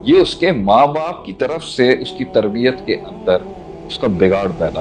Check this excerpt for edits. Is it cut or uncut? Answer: uncut